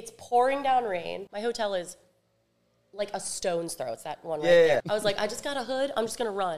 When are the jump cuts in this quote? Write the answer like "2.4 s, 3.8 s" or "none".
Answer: 1.3 s, 4.8 s